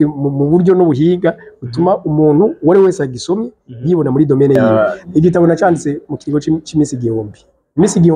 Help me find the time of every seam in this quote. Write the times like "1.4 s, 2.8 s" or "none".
4.9 s

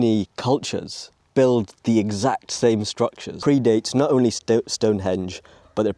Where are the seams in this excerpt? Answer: 3.4 s

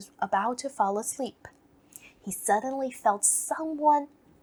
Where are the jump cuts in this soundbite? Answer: none

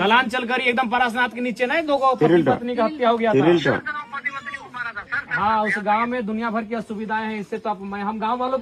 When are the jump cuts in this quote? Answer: none

